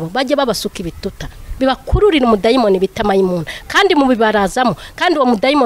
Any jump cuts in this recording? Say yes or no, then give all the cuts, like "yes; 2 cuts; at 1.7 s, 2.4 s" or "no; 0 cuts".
no; 0 cuts